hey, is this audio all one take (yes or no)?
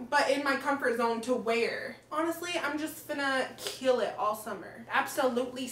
no